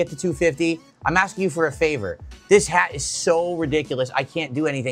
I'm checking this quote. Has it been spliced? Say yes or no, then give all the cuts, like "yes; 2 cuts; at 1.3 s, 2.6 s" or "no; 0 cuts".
no; 0 cuts